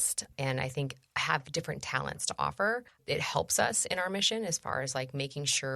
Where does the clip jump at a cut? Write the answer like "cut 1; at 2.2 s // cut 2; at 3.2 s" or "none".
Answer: cut 1; at 3.0 s